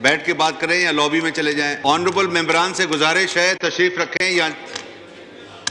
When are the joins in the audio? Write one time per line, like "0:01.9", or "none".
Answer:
0:01.7